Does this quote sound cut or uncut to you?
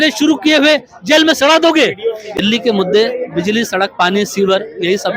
cut